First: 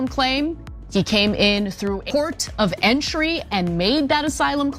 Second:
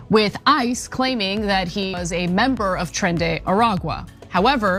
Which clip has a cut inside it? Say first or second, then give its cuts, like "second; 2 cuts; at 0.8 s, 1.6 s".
first; 1 cut; at 2.0 s